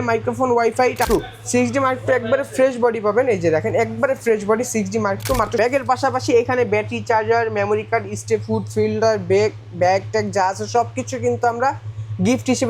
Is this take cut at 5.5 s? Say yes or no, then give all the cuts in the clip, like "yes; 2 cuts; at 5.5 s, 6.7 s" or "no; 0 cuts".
yes; 2 cuts; at 1.0 s, 5.5 s